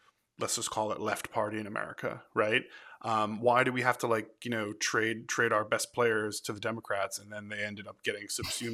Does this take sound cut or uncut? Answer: uncut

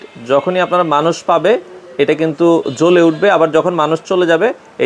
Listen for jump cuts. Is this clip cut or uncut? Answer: uncut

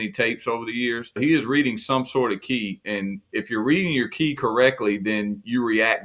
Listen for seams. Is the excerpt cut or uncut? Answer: cut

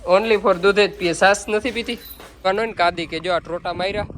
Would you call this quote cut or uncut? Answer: cut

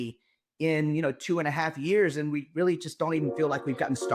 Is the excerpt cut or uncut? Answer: uncut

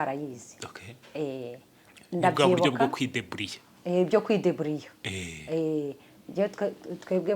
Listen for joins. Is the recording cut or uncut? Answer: uncut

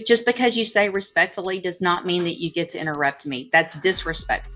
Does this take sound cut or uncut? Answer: uncut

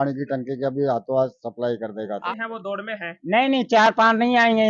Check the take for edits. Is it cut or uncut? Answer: cut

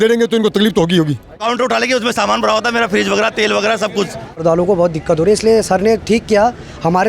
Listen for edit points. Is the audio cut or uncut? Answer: cut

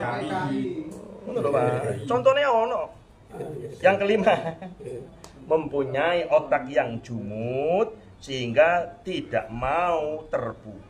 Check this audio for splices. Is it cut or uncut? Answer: uncut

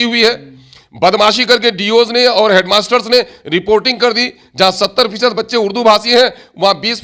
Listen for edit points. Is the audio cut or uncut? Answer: uncut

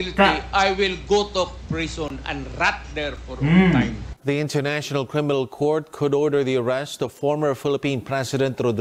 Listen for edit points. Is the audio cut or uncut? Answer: cut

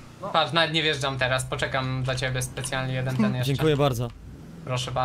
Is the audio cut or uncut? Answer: uncut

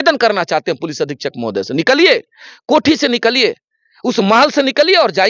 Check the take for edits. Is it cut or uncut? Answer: uncut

